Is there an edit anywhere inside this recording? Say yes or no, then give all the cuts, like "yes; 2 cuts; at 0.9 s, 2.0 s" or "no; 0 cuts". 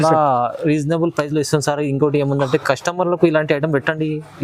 no; 0 cuts